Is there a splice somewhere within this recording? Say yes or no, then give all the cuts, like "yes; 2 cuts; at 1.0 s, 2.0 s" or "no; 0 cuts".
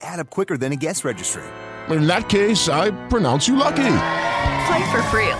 no; 0 cuts